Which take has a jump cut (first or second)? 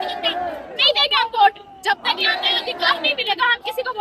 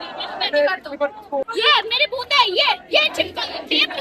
second